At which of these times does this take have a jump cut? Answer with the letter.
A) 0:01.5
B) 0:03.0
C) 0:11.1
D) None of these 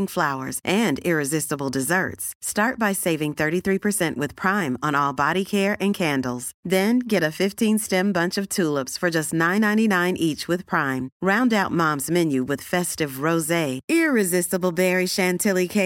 D